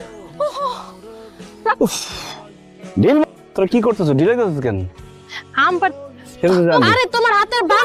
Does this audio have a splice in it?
yes; 1 cut; at 6.9 s

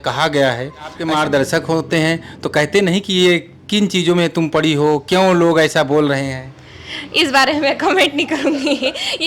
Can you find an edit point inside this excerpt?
yes; 1 cut; at 1.0 s

